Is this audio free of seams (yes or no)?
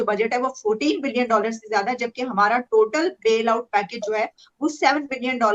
yes